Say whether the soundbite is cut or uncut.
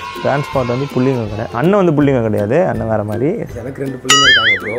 cut